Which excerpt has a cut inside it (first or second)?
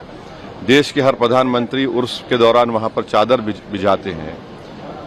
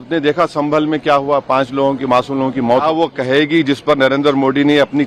second